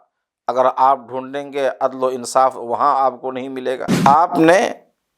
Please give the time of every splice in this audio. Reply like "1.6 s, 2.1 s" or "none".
3.9 s